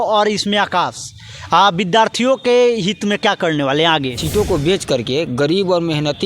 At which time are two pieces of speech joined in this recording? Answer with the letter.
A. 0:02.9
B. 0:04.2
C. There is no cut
B